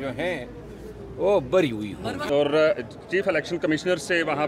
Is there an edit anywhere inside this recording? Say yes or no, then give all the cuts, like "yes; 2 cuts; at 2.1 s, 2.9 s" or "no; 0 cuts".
yes; 1 cut; at 2.3 s